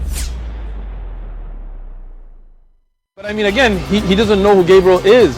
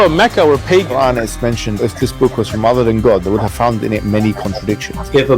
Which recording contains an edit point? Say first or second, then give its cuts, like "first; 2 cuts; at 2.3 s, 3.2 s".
second; 1 cut; at 1.9 s